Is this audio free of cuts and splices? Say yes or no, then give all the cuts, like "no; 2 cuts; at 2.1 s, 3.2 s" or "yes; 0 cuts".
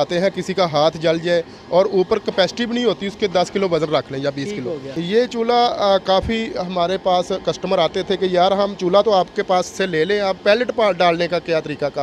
no; 1 cut; at 4.9 s